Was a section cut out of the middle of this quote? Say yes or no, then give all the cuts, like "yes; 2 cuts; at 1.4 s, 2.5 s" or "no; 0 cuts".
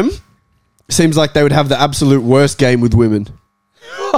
no; 0 cuts